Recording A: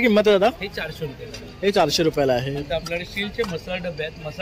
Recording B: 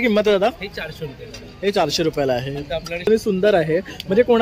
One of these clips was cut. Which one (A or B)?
B